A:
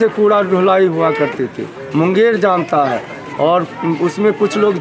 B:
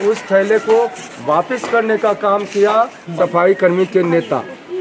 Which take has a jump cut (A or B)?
B